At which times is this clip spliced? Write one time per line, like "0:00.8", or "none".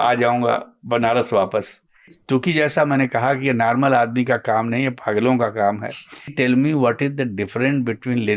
0:02.1
0:06.3

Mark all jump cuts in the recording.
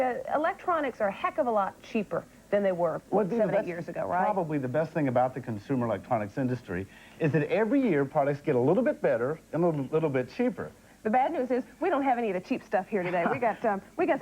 0:08.8

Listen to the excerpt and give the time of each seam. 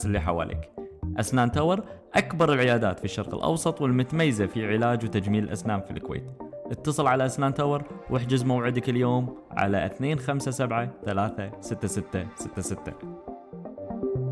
0:12.8

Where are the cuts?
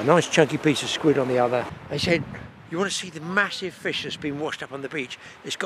0:01.8

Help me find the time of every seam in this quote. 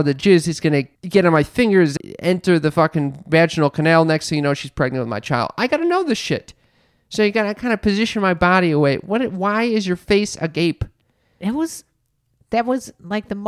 0:01.0
0:01.9

